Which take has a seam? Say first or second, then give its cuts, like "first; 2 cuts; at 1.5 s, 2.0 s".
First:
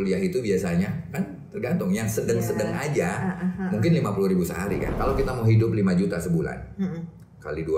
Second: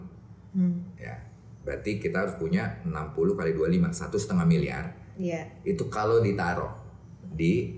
first; 1 cut; at 4.9 s